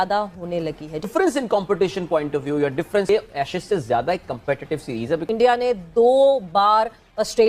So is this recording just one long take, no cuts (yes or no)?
no